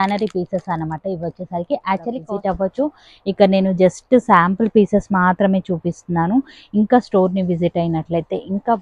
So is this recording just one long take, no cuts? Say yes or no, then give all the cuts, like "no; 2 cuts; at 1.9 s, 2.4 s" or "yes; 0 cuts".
no; 1 cut; at 2.2 s